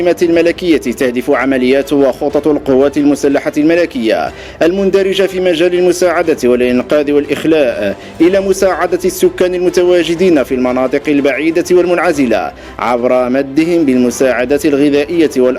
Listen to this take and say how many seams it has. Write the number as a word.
zero